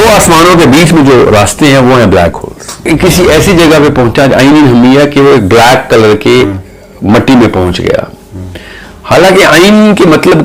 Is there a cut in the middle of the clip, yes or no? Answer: yes